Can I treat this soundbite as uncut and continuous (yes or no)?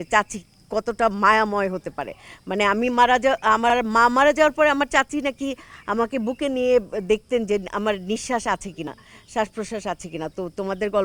yes